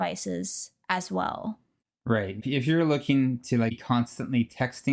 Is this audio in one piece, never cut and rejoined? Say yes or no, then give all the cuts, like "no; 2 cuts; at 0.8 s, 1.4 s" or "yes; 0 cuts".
no; 2 cuts; at 2.4 s, 3.8 s